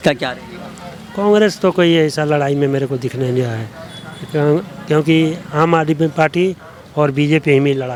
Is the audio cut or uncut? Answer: uncut